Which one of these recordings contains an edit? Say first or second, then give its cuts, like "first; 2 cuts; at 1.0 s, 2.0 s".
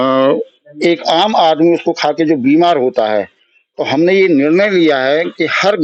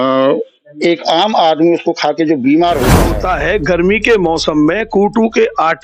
second; 1 cut; at 3.1 s